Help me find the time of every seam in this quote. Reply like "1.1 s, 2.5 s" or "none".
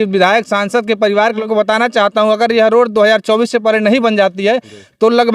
1.4 s